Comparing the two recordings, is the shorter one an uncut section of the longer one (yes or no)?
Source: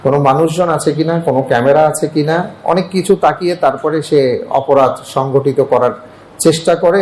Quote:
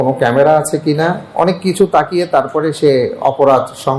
yes